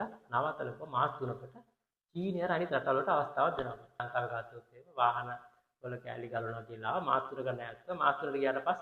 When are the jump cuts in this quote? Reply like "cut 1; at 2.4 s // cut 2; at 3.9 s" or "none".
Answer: cut 1; at 4.0 s